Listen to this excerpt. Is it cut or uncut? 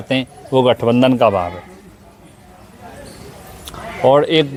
uncut